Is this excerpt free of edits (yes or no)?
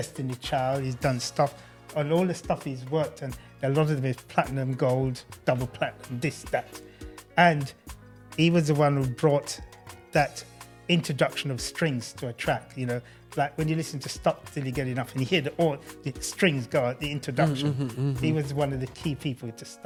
yes